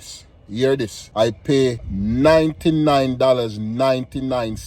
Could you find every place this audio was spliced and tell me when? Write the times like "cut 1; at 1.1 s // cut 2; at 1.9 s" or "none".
cut 1; at 1.0 s // cut 2; at 1.8 s